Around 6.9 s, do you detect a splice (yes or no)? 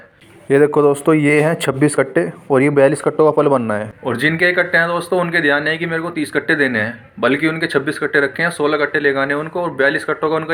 no